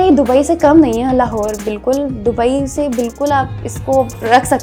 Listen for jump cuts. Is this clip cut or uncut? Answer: uncut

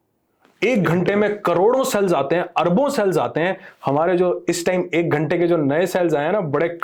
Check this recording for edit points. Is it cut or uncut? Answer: uncut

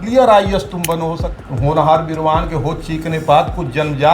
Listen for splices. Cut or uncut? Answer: cut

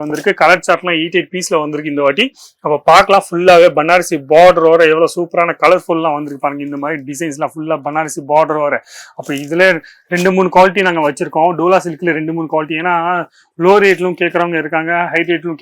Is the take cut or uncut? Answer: uncut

